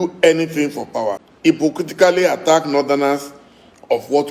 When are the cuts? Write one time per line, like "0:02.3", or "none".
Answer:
0:01.3